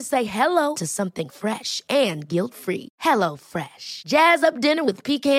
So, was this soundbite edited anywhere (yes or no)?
no